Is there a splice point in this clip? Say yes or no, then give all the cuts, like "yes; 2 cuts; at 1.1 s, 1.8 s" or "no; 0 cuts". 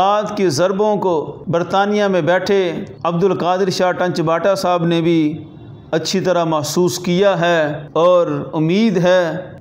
no; 0 cuts